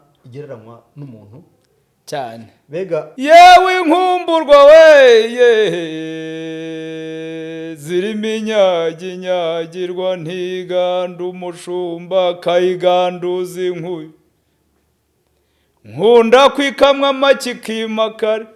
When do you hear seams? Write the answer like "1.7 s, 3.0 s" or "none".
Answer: 3.1 s